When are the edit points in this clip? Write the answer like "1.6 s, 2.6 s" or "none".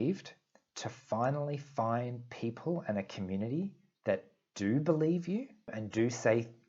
5.8 s